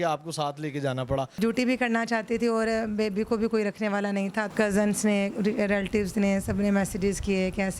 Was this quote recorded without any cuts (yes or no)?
no